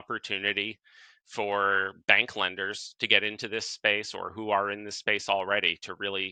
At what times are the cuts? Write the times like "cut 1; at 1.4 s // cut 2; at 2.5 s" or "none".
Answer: none